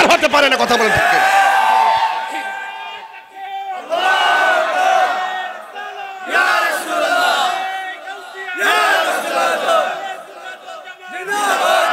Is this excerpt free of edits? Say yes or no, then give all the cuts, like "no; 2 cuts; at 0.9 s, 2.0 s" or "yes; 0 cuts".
yes; 0 cuts